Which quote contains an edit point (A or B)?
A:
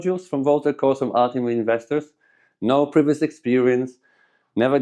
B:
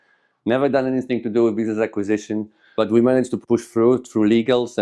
B